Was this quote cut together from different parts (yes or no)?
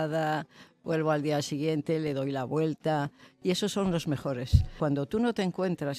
yes